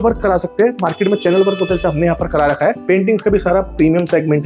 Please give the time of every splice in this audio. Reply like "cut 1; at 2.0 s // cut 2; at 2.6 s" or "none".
cut 1; at 2.8 s